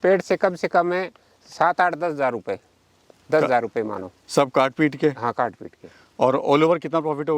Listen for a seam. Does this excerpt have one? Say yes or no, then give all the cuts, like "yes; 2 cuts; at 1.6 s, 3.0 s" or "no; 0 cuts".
no; 0 cuts